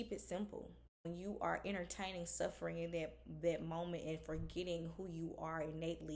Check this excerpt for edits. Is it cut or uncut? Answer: cut